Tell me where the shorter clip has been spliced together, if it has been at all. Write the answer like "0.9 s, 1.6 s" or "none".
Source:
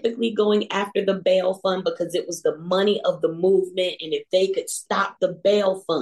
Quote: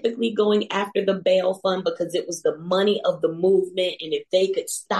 none